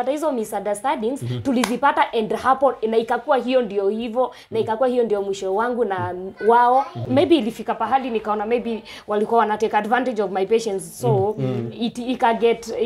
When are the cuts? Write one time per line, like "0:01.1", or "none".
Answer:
0:07.0